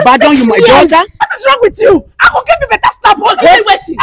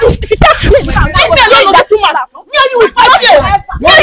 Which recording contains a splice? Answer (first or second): first